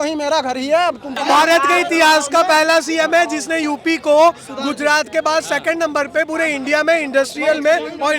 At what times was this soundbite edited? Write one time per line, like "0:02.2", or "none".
0:01.1